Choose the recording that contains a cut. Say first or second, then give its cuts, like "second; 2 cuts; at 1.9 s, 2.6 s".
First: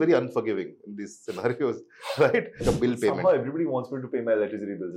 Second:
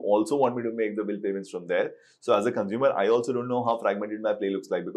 first; 1 cut; at 2.6 s